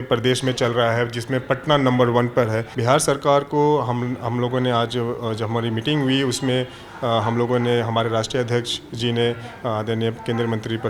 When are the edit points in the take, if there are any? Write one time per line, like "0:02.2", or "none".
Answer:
0:02.7